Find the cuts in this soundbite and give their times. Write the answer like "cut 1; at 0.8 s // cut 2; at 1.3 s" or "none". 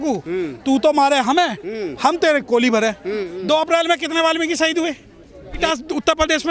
cut 1; at 3.3 s // cut 2; at 5.6 s